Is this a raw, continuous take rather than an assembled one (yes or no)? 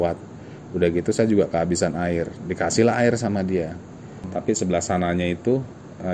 no